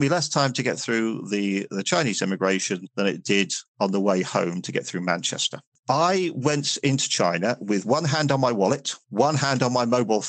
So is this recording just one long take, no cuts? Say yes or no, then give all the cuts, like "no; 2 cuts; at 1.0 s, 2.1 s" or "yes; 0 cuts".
no; 1 cut; at 5.7 s